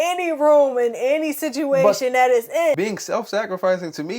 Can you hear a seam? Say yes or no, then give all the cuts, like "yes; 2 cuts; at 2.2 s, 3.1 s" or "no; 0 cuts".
yes; 1 cut; at 2.8 s